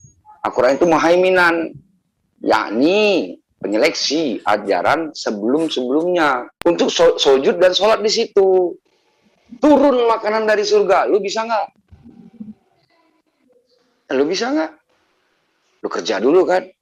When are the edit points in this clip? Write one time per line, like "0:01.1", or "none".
0:06.5